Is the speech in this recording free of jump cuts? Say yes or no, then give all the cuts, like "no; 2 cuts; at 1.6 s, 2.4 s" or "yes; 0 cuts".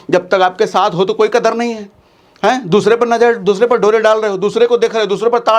yes; 0 cuts